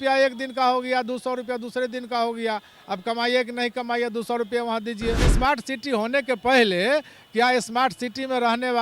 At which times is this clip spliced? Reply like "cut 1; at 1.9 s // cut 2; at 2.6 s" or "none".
cut 1; at 5.3 s